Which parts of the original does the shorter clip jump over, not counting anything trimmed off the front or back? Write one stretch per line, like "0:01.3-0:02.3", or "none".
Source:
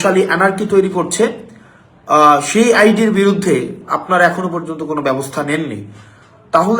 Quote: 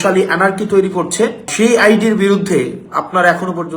0:01.5-0:02.5